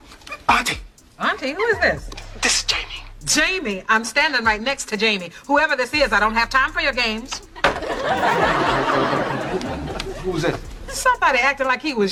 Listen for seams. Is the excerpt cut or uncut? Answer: uncut